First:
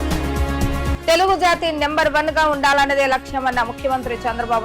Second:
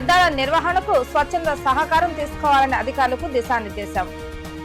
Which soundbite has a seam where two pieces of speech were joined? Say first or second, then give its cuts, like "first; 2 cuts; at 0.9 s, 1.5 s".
first; 1 cut; at 0.9 s